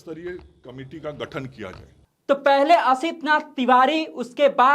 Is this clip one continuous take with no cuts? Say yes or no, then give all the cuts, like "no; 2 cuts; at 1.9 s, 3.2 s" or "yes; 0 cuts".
no; 1 cut; at 2.1 s